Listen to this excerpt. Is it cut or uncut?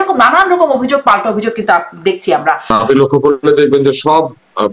cut